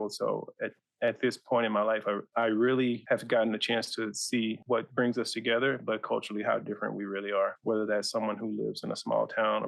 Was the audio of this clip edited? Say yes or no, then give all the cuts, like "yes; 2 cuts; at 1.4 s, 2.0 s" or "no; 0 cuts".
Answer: yes; 3 cuts; at 2.3 s, 3.0 s, 4.6 s